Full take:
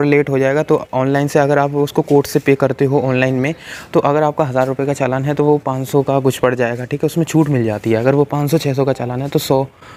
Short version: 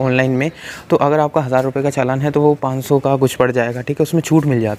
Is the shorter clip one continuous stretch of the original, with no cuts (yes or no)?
yes